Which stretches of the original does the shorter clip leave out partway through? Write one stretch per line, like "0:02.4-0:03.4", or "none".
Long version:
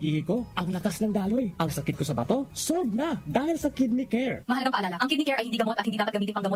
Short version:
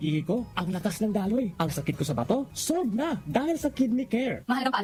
none